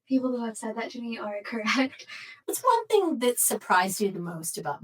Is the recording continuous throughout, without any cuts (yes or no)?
no